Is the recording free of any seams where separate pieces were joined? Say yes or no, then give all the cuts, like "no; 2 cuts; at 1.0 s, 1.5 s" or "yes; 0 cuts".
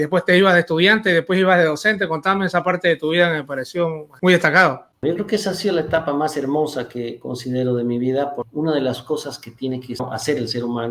no; 4 cuts; at 4.1 s, 4.9 s, 8.5 s, 10.0 s